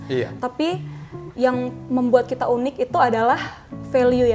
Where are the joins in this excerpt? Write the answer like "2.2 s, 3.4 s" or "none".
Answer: none